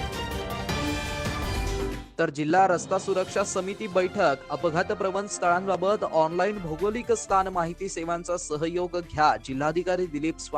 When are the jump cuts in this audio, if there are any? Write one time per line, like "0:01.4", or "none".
0:02.0